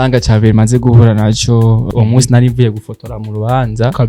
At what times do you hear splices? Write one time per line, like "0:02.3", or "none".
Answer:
0:01.9